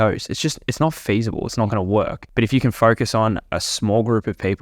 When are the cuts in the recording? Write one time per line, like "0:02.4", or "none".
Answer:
0:02.2